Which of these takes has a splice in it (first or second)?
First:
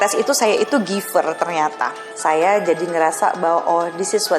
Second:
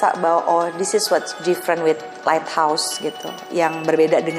first